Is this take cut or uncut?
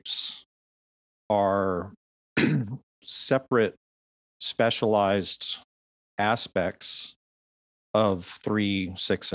uncut